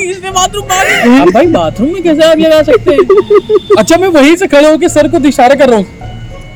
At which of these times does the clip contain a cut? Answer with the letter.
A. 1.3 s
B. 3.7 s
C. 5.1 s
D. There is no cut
D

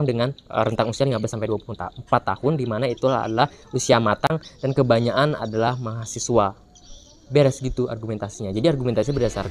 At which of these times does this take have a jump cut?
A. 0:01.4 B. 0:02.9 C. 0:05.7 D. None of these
D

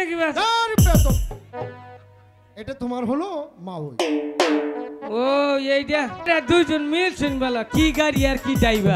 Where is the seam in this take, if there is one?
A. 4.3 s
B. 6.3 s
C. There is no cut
B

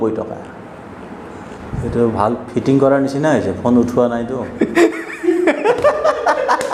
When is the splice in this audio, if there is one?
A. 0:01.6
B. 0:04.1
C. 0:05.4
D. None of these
A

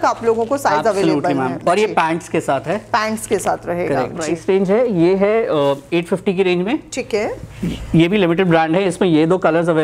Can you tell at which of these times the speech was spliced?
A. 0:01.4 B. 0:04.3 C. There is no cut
B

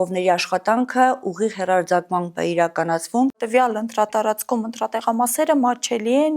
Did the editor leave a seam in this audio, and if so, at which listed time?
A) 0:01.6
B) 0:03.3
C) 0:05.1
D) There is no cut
B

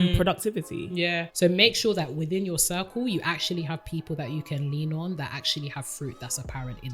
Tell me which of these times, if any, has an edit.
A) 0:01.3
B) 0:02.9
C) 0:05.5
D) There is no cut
A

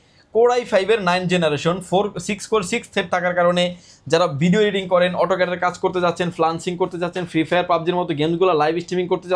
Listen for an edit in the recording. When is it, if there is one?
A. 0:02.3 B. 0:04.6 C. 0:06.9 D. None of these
D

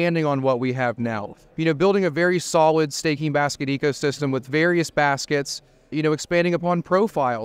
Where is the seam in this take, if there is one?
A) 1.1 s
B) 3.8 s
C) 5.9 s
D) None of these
C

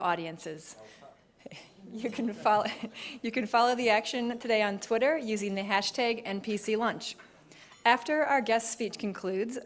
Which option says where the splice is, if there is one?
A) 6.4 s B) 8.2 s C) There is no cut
A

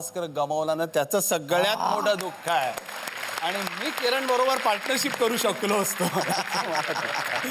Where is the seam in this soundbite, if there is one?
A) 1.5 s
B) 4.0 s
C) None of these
C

